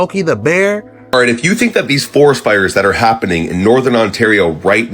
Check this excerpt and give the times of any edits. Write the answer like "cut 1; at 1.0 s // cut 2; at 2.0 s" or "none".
cut 1; at 0.9 s

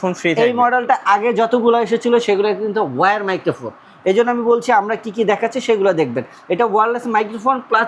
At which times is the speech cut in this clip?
none

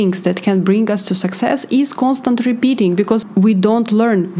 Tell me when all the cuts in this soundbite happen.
cut 1; at 3.2 s

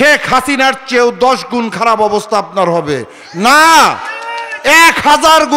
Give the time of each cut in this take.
none

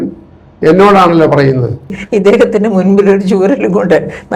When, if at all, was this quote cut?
cut 1; at 2.0 s

